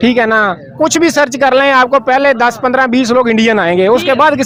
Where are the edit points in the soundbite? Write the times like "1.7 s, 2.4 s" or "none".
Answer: none